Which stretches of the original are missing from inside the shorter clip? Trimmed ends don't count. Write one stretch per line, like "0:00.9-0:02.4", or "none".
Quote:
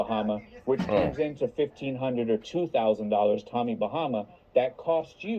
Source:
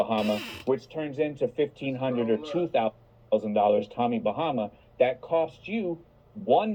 0:02.8-0:03.3